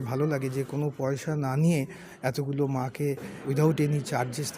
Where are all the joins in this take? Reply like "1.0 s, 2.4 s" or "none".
3.3 s